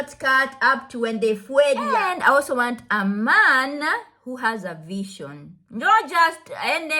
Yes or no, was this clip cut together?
yes